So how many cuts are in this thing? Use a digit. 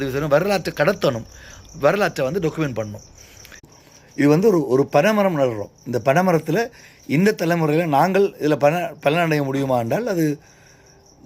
1